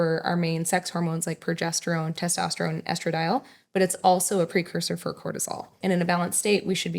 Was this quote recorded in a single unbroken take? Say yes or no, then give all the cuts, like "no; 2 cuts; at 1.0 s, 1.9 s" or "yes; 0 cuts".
no; 1 cut; at 5.7 s